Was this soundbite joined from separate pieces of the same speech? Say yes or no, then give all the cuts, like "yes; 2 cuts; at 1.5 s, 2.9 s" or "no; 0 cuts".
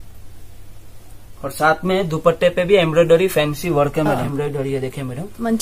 yes; 1 cut; at 4.2 s